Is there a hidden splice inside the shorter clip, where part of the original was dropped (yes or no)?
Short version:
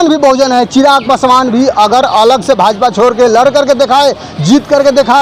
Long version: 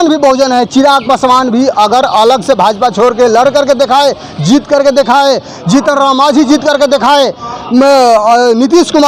no